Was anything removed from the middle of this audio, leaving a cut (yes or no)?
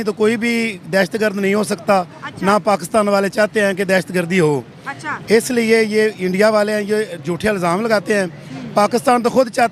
no